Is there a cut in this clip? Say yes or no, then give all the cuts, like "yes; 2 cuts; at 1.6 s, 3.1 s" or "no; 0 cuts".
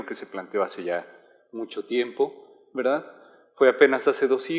no; 0 cuts